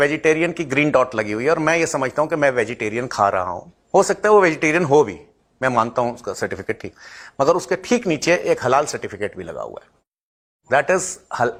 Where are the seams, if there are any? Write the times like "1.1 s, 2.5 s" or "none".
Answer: none